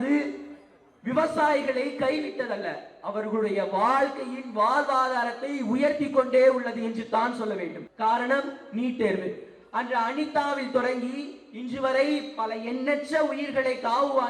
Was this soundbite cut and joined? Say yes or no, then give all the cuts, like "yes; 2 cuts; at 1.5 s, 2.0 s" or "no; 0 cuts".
yes; 1 cut; at 7.8 s